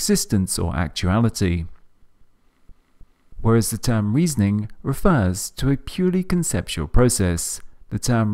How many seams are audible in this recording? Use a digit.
1